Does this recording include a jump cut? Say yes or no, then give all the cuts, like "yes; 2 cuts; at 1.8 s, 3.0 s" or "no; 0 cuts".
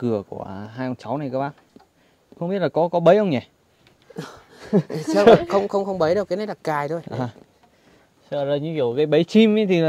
no; 0 cuts